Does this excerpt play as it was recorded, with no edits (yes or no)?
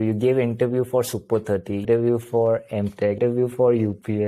no